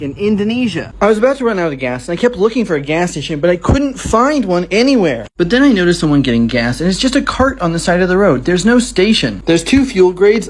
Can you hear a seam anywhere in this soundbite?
no; 0 cuts

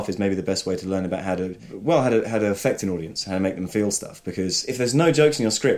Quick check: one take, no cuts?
no; 2 cuts; at 1.7 s, 4.6 s

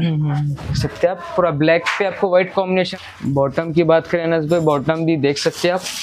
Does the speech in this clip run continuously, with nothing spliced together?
no; 1 cut; at 2.9 s

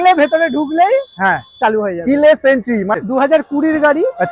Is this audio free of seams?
no; 1 cut; at 3.0 s

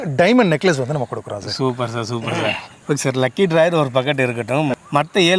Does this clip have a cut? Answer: no; 0 cuts

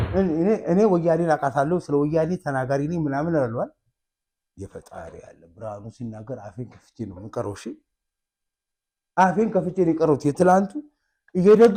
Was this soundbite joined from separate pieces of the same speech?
no; 0 cuts

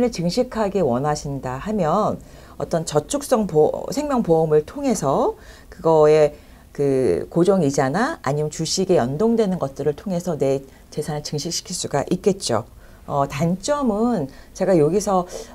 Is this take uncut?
yes; 0 cuts

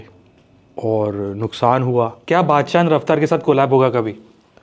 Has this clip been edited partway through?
yes; 1 cut; at 2.2 s

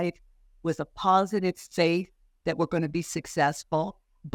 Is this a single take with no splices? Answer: yes; 0 cuts

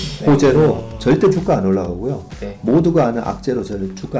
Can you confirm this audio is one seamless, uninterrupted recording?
yes; 0 cuts

